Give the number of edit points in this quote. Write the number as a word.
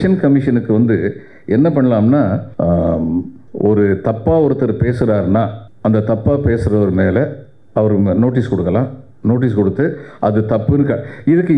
three